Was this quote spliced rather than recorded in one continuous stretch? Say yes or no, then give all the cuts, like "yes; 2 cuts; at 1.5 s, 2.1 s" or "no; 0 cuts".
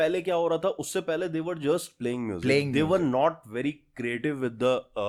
no; 0 cuts